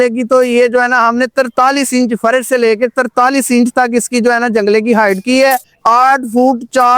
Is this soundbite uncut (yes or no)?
no